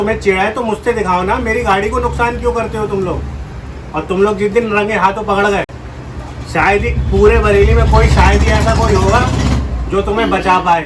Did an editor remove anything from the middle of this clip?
no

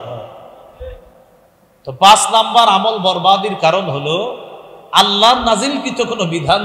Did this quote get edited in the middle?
no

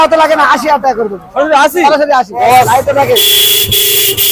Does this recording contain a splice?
yes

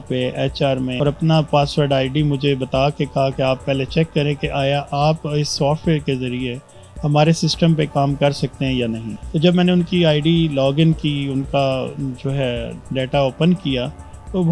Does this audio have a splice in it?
yes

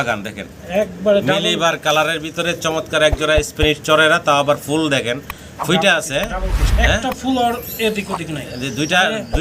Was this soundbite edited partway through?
no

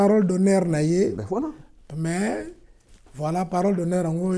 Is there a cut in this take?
no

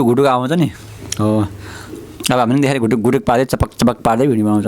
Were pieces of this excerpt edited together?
no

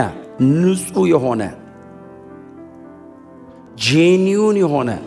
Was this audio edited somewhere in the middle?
yes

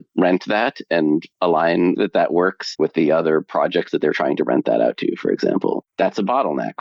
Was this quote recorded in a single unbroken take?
no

